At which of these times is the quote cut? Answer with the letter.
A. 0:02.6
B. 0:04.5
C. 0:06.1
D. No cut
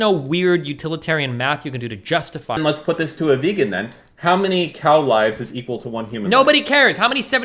A